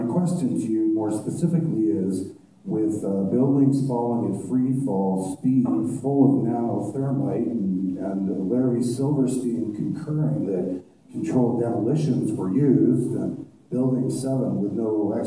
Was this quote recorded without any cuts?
no; 1 cut; at 13.6 s

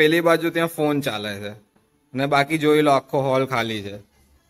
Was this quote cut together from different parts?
no; 0 cuts

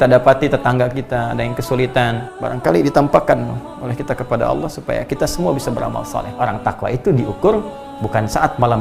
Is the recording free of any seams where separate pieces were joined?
no; 2 cuts; at 2.3 s, 6.4 s

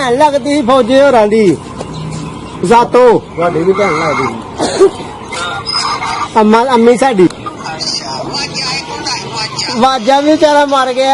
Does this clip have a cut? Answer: yes; 1 cut; at 7.3 s

